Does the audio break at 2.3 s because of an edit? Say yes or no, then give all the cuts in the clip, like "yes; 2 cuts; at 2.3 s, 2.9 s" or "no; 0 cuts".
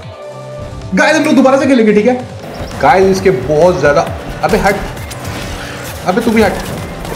yes; 1 cut; at 2.3 s